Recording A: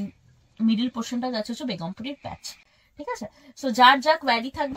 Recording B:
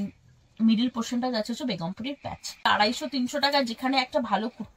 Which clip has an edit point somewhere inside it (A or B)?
B